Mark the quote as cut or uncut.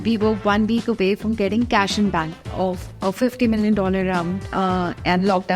cut